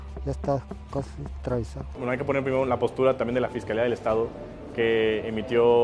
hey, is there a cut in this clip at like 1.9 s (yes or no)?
yes